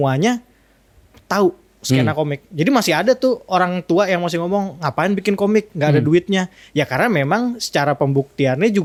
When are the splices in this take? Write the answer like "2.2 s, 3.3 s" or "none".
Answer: none